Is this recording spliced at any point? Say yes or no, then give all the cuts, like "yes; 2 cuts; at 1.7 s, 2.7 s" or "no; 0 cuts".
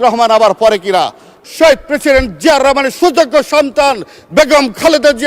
yes; 1 cut; at 1.3 s